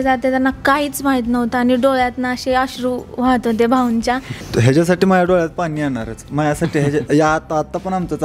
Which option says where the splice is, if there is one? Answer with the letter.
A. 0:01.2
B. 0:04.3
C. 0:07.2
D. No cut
B